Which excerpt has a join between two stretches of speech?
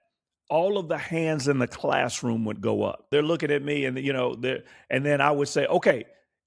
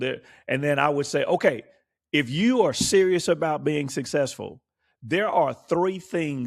first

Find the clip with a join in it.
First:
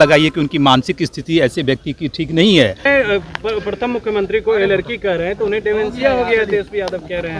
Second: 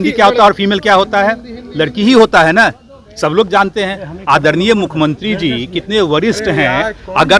first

